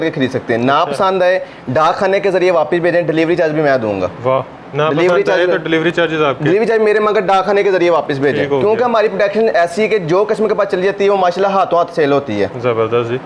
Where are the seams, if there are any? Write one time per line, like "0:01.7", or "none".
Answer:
none